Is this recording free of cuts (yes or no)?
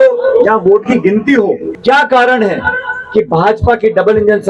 no